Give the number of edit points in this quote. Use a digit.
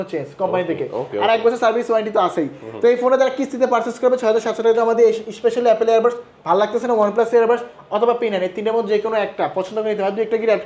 0